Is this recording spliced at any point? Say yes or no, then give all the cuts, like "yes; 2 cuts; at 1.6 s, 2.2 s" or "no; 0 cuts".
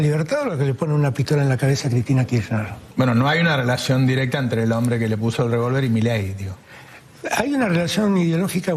no; 0 cuts